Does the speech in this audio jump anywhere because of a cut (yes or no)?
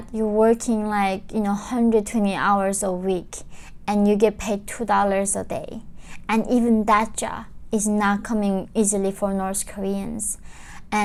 no